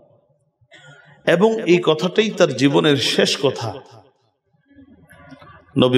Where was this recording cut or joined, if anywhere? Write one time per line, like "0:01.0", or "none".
none